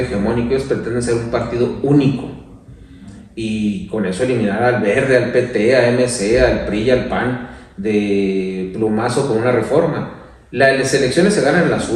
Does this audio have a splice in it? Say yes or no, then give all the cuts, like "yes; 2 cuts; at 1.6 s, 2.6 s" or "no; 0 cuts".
no; 0 cuts